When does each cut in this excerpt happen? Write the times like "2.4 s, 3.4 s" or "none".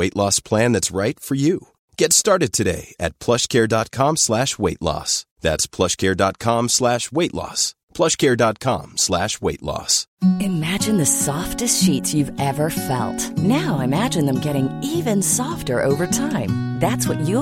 10.0 s